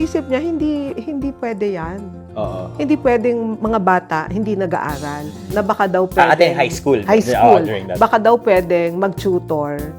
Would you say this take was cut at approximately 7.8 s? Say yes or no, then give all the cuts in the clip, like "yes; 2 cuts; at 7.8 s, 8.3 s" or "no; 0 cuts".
no; 1 cut; at 5.3 s